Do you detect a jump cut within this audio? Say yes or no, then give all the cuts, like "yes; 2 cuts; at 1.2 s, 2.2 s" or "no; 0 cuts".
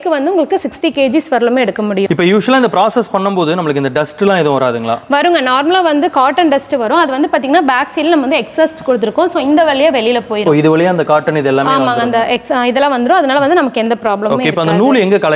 no; 0 cuts